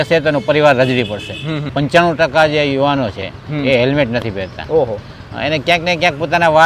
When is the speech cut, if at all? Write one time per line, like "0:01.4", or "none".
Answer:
0:01.7